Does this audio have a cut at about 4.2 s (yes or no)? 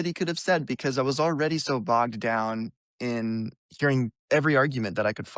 yes